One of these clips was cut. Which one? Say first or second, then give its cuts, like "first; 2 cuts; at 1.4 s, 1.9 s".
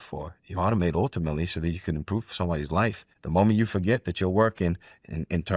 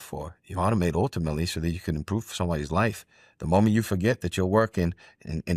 first; 1 cut; at 3.1 s